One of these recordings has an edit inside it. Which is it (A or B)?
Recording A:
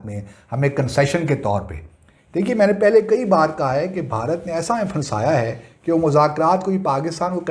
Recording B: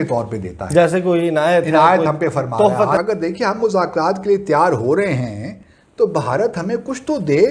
B